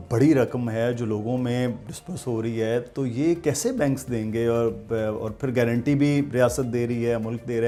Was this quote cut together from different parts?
no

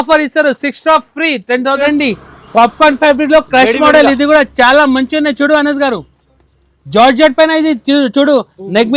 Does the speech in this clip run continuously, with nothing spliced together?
no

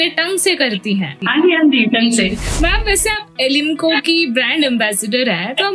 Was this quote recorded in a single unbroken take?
no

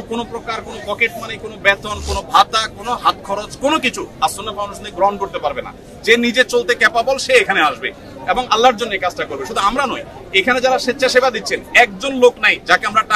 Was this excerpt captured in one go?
yes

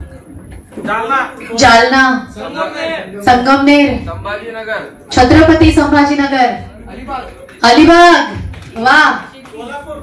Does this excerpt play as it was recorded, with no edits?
yes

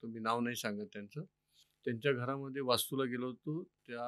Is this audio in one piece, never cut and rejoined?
yes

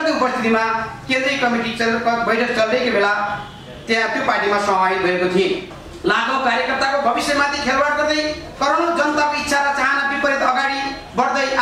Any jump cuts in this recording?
yes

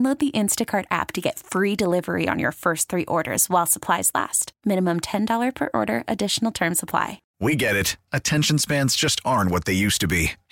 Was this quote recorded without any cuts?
no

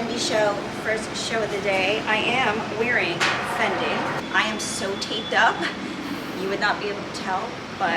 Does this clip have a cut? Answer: yes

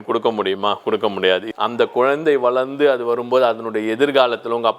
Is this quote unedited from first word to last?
no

